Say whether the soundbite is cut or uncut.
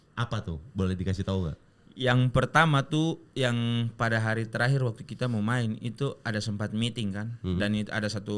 uncut